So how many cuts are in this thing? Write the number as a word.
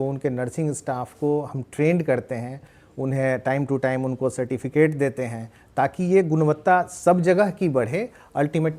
zero